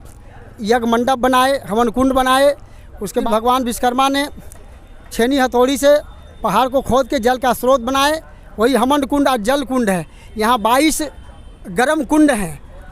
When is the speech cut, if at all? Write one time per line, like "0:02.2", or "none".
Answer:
0:03.2